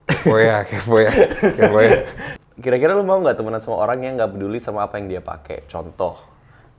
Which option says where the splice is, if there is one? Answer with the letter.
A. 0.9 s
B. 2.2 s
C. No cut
B